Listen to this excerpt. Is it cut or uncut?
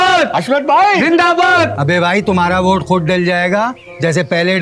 uncut